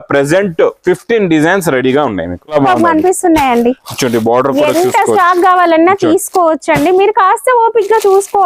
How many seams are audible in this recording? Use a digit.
1